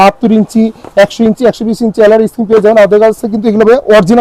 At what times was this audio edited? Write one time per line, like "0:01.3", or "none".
none